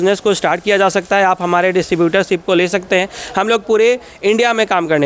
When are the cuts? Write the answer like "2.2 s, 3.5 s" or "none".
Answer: none

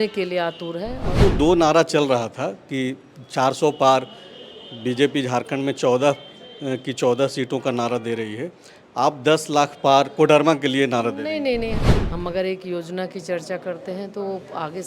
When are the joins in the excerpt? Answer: 1.1 s, 11.8 s

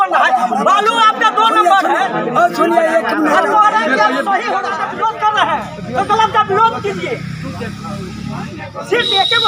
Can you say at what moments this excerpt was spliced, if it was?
4.7 s

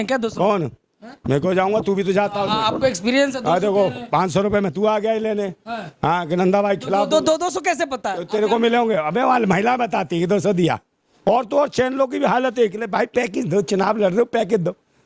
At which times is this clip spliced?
11.1 s

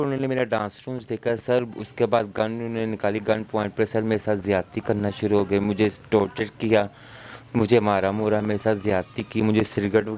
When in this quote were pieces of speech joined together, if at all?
none

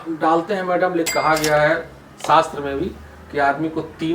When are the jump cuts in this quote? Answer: 1.1 s

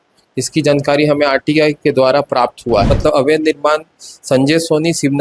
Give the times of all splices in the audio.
2.9 s

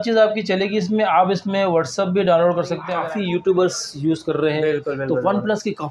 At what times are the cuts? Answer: 2.9 s

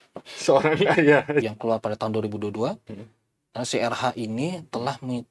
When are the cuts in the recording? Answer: 1.4 s

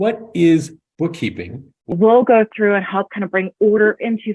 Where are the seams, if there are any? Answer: 1.9 s

